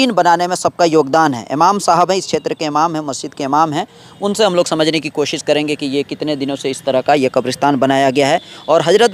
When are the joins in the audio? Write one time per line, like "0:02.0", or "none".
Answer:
none